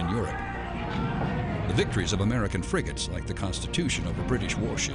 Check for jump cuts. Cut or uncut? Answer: uncut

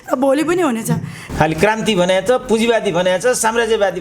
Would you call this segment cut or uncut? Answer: cut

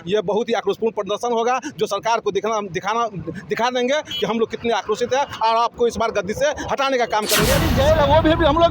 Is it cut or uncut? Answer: cut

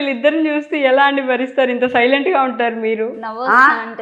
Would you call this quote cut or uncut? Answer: uncut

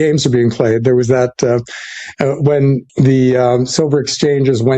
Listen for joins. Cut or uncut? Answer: uncut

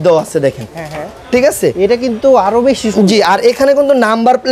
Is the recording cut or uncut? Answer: uncut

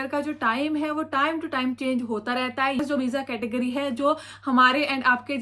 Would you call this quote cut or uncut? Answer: cut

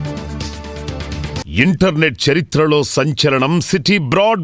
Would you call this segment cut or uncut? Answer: cut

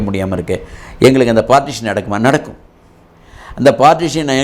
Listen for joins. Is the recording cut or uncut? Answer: uncut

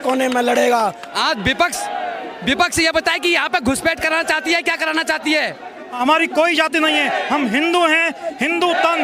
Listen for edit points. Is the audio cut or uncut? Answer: cut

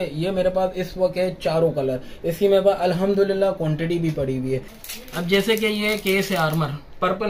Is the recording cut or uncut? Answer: cut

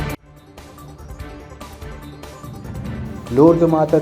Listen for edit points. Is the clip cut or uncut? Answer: cut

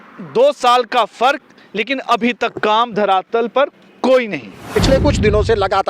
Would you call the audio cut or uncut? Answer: cut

